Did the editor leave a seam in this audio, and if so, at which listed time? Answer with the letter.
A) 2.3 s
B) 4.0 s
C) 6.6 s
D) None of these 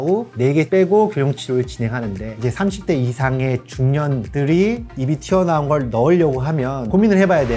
A